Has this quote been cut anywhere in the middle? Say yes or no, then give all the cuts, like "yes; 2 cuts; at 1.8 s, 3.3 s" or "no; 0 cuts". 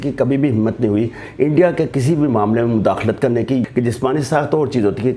yes; 1 cut; at 3.7 s